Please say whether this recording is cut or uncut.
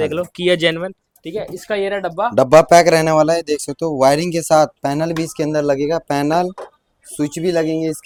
uncut